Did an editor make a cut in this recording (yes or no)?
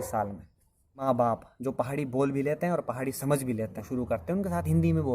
yes